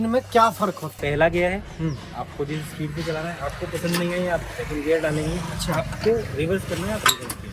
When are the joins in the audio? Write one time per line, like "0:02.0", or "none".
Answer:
0:01.0